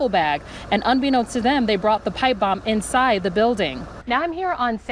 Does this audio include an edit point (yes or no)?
yes